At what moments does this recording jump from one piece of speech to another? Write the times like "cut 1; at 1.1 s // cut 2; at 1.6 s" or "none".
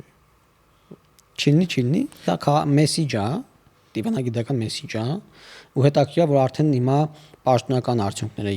cut 1; at 2.2 s